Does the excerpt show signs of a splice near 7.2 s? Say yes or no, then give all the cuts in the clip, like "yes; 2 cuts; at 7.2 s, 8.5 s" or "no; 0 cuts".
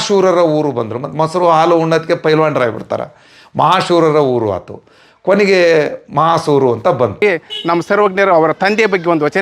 yes; 1 cut; at 7.2 s